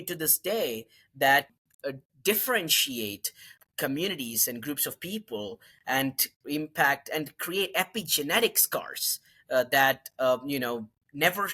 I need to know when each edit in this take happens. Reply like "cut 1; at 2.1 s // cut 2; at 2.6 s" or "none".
cut 1; at 1.5 s // cut 2; at 3.5 s